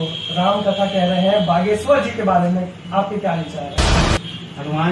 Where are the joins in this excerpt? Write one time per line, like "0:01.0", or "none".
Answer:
0:04.0